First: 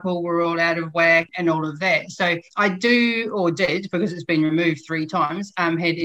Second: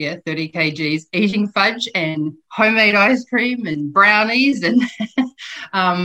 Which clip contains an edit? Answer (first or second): first